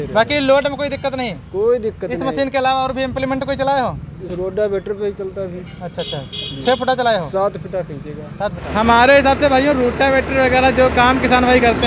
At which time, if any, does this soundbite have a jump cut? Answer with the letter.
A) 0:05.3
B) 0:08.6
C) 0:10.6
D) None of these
B